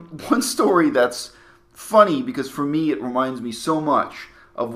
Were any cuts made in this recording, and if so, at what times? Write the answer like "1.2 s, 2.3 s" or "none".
none